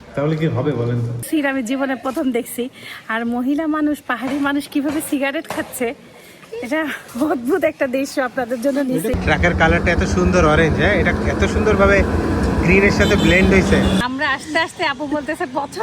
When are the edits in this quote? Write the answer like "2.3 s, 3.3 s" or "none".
1.3 s, 9.1 s, 14.0 s